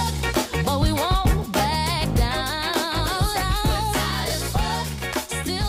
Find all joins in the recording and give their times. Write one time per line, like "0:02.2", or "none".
none